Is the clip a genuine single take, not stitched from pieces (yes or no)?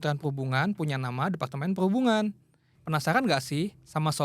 no